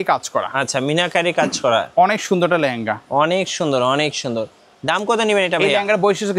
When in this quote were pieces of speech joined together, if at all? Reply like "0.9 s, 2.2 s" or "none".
none